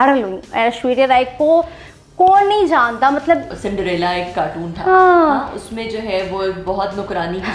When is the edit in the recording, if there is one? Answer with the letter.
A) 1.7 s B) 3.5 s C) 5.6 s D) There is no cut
B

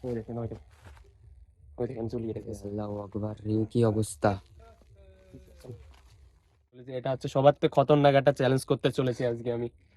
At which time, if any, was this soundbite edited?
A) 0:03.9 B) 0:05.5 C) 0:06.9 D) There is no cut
C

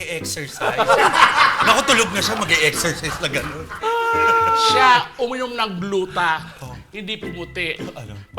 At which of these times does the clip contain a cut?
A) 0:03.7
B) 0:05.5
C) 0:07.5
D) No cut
A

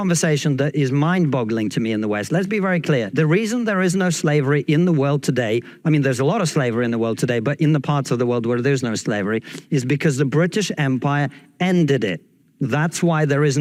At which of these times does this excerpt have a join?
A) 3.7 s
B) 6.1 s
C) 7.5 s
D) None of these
D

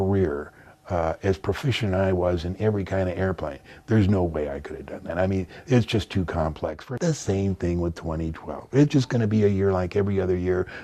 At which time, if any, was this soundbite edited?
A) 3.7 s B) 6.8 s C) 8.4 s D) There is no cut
B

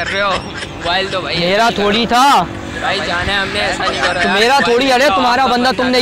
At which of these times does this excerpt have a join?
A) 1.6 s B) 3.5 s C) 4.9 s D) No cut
A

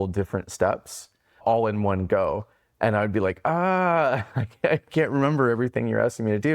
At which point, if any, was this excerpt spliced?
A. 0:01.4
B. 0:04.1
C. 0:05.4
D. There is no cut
A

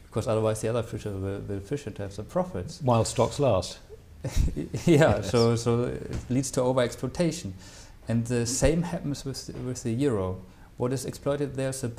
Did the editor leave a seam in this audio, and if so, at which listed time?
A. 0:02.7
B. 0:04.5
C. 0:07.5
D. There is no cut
D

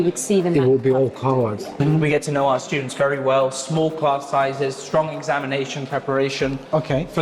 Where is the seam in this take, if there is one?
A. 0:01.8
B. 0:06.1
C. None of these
A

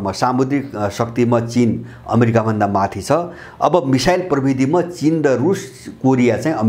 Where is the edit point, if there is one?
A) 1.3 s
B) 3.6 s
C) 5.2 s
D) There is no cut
D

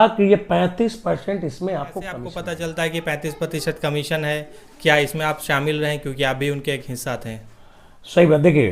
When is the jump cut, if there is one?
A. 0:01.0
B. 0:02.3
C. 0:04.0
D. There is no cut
B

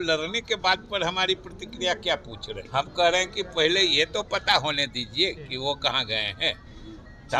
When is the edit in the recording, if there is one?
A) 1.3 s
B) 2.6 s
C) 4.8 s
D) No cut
B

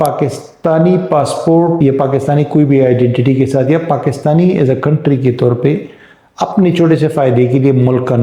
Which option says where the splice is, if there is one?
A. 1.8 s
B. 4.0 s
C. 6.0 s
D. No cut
A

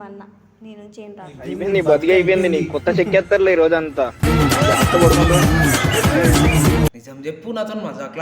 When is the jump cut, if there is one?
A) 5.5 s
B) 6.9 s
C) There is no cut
B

